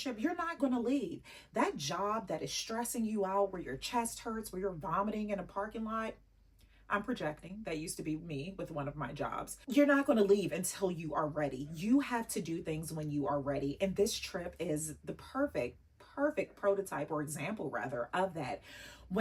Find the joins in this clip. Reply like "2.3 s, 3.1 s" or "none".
none